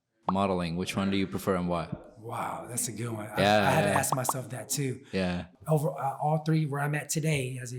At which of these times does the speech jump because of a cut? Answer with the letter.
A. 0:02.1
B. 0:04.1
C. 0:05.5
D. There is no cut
C